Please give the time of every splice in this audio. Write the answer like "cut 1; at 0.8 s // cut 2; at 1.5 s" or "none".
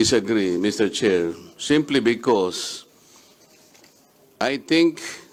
none